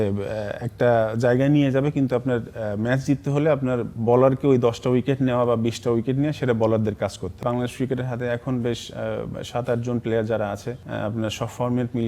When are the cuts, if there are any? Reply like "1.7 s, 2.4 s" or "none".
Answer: 7.4 s